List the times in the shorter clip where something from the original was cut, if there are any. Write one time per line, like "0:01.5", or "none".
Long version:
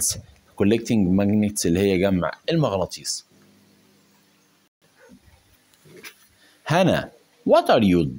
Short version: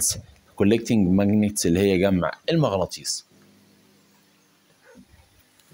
0:04.7